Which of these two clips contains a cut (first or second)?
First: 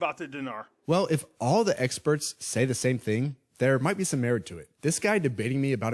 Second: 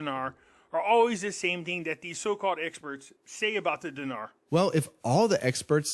first